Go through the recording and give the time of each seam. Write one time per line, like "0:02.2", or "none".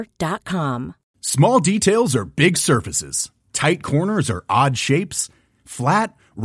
0:01.0